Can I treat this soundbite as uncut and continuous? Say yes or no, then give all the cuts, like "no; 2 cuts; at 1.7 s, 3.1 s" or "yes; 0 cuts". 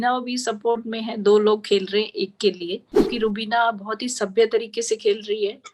no; 1 cut; at 3.1 s